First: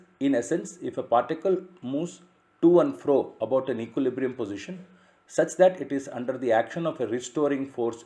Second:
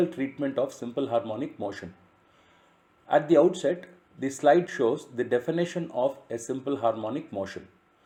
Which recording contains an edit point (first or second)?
first